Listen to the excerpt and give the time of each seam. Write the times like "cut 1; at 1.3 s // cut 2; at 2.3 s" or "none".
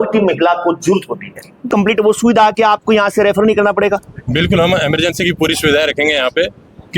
cut 1; at 1.7 s